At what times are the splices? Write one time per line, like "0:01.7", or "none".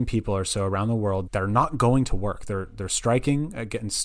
0:01.2